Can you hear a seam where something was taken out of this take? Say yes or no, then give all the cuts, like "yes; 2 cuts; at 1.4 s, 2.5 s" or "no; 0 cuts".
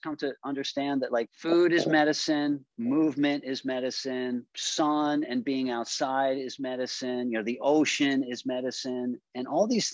no; 0 cuts